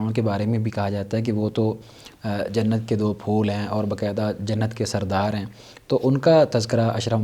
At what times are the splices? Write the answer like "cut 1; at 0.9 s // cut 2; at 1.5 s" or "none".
none